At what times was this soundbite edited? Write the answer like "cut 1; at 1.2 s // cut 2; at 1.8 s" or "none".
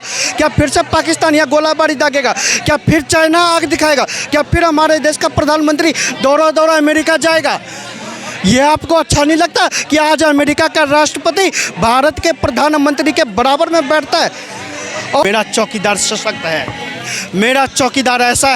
cut 1; at 15.2 s

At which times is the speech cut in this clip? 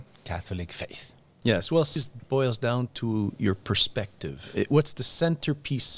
cut 1; at 2.0 s // cut 2; at 4.5 s

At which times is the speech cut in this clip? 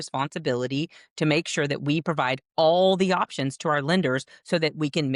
none

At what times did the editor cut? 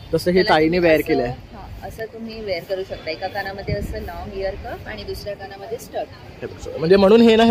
none

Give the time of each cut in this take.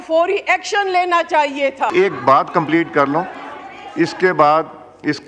cut 1; at 1.9 s

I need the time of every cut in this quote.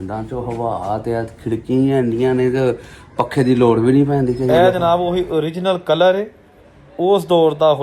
cut 1; at 4.5 s

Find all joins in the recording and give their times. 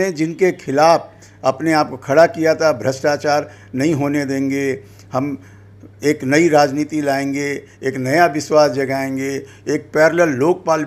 none

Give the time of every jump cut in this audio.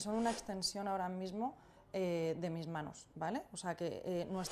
cut 1; at 3.0 s

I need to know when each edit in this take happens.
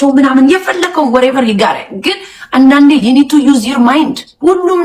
none

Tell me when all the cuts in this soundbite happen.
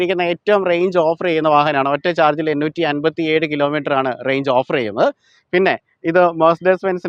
none

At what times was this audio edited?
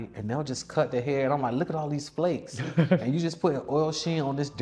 none

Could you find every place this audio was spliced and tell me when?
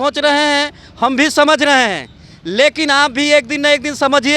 none

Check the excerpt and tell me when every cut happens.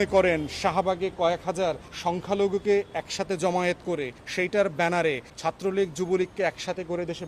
cut 1; at 1.9 s // cut 2; at 4.2 s // cut 3; at 5.3 s

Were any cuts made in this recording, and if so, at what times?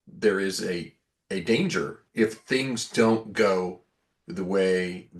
cut 1; at 2.0 s

